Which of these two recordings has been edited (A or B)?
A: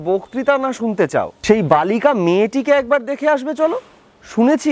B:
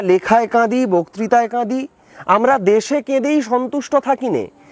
A